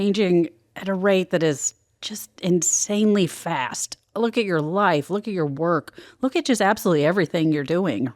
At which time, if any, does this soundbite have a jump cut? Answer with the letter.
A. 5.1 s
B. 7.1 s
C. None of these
C